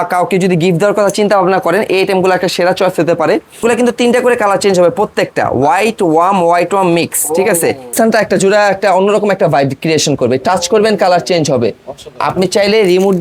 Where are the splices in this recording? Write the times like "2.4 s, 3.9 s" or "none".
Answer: 3.6 s, 7.9 s